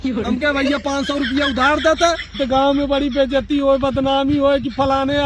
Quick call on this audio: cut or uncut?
cut